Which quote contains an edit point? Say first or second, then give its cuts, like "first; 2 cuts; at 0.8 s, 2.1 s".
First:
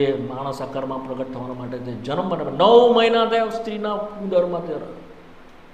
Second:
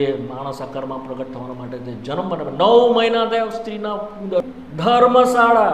second; 1 cut; at 4.6 s